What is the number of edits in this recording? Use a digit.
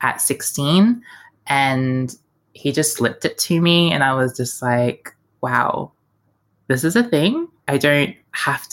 2